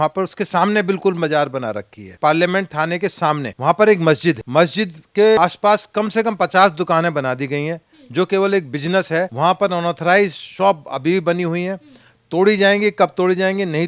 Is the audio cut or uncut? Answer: cut